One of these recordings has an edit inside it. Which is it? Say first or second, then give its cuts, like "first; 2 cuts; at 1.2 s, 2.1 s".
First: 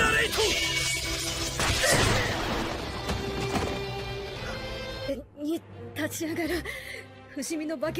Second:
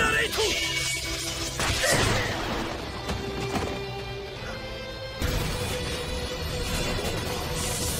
second; 1 cut; at 5.1 s